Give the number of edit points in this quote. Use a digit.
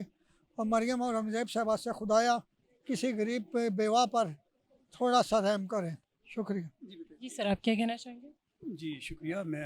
0